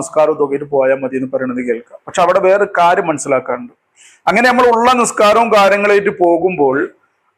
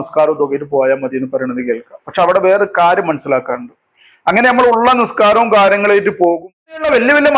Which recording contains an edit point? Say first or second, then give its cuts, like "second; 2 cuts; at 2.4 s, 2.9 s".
second; 1 cut; at 6.4 s